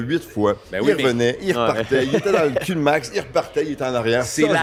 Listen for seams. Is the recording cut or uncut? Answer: uncut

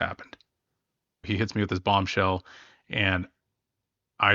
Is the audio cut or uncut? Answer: cut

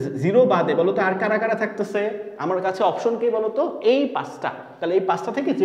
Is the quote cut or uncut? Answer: uncut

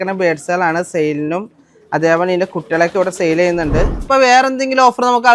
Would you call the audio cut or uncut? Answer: cut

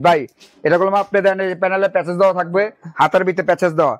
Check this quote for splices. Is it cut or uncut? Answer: uncut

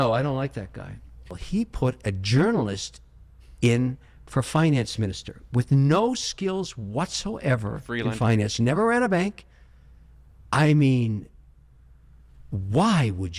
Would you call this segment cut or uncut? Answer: cut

